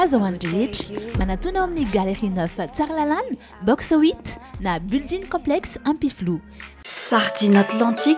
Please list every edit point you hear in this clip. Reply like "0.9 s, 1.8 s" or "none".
6.8 s